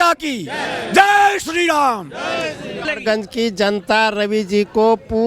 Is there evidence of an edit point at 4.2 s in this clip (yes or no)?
no